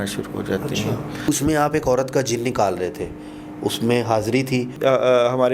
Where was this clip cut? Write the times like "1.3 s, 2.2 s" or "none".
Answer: 1.3 s, 4.7 s